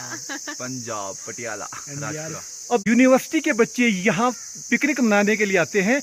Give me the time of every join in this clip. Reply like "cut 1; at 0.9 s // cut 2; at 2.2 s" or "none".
none